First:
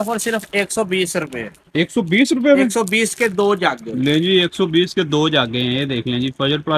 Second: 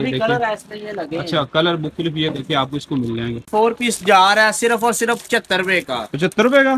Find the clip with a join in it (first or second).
second